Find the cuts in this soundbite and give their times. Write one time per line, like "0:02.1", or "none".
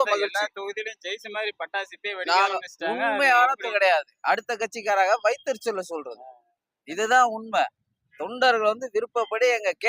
0:03.7